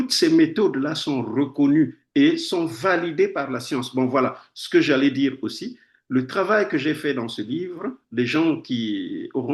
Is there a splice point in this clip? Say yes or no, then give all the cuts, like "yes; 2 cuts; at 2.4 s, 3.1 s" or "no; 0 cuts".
no; 0 cuts